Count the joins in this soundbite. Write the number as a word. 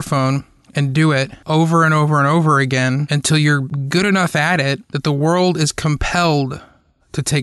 two